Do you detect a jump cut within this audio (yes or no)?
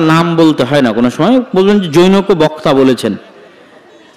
no